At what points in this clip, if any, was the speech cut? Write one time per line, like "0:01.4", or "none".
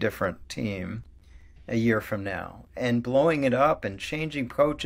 none